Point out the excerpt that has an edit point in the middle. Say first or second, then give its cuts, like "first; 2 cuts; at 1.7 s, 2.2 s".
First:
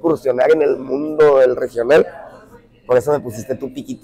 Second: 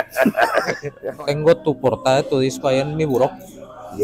second; 1 cut; at 1.0 s